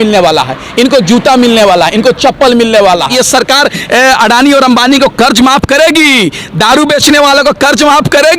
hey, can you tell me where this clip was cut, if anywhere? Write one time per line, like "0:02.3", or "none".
0:03.1